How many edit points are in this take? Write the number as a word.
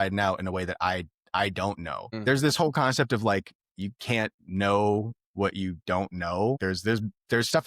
two